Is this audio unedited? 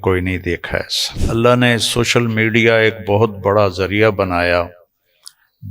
no; 1 cut; at 1.1 s

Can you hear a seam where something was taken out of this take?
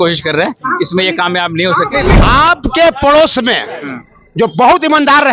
yes; 1 cut; at 2.2 s

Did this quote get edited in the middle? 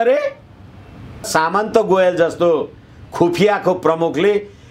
yes; 1 cut; at 1.3 s

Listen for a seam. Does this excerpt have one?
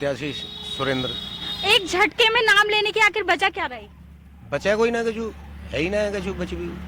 no; 0 cuts

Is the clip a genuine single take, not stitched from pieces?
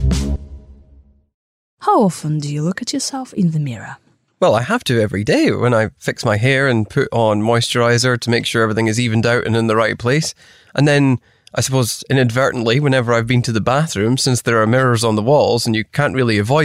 no; 1 cut; at 1.6 s

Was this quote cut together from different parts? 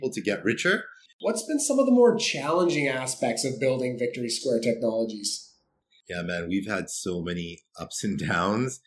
yes; 1 cut; at 1.0 s

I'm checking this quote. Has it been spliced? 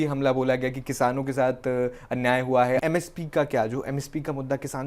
yes; 1 cut; at 2.8 s

